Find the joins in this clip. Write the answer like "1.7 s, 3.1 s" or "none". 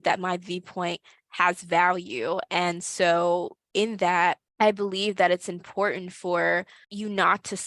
3.6 s